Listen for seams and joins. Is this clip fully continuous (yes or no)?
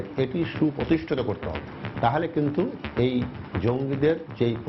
yes